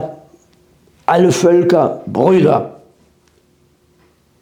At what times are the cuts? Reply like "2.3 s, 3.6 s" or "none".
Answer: none

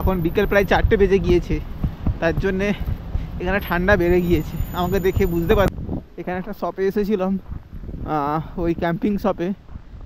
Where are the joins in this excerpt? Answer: 5.7 s

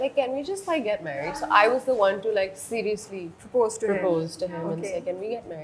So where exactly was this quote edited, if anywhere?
none

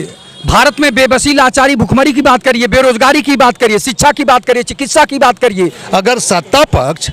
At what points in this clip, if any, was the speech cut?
5.8 s

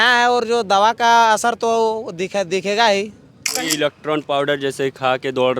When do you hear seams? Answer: 3.7 s

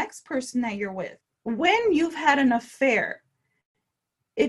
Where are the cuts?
1.2 s

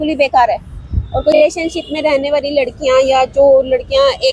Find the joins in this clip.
1.3 s

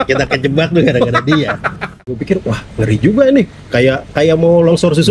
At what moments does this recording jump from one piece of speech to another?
2.2 s

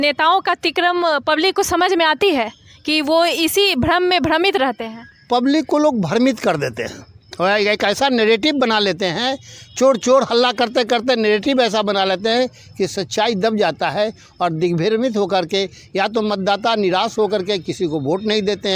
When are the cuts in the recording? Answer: none

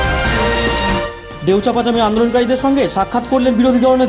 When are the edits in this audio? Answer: 1.2 s

